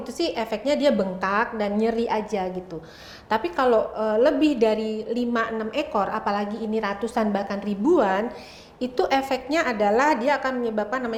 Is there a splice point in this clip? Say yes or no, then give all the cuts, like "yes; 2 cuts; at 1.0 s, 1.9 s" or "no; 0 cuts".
no; 0 cuts